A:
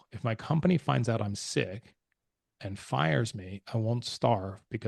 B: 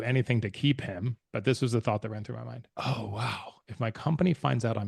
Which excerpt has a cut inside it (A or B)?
B